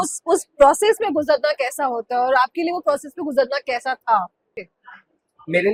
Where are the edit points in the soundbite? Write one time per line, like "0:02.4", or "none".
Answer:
none